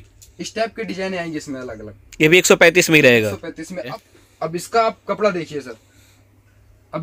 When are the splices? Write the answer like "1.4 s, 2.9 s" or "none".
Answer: 3.9 s